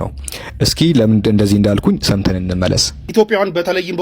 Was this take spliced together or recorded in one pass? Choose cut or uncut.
cut